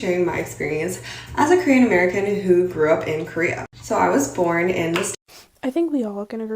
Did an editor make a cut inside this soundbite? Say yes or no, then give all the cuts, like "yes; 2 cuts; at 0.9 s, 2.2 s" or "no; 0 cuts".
yes; 1 cut; at 5.1 s